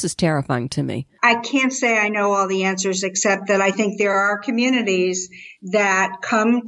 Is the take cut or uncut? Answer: cut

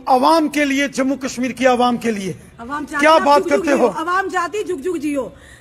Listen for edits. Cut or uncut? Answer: uncut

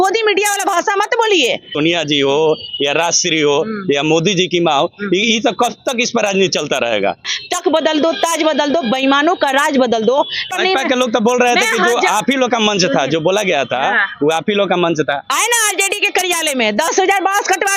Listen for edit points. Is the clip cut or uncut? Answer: cut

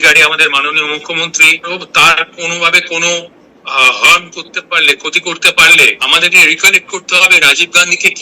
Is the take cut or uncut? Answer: cut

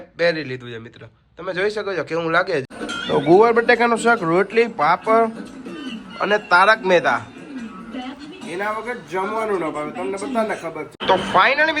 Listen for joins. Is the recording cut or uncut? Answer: cut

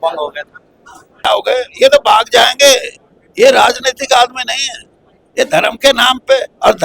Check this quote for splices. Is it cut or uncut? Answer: cut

